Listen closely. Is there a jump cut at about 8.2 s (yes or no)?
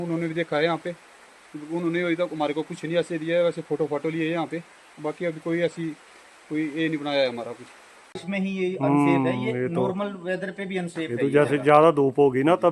yes